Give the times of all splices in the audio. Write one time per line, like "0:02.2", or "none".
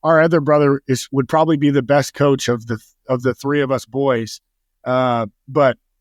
none